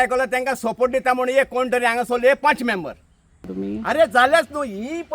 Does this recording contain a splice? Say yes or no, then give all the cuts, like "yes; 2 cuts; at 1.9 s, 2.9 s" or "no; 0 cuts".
yes; 1 cut; at 3.5 s